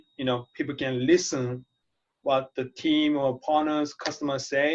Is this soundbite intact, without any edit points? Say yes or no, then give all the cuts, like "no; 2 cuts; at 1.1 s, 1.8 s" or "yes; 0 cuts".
yes; 0 cuts